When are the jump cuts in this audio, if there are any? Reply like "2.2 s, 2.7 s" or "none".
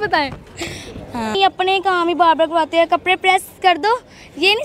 1.3 s